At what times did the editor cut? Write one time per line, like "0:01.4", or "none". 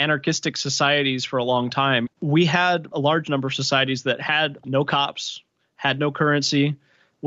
0:02.1
0:02.9
0:04.6